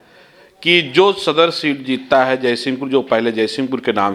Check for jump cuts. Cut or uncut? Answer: uncut